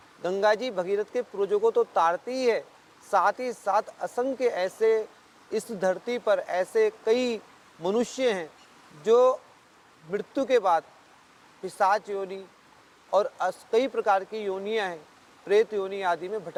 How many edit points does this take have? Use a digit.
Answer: 0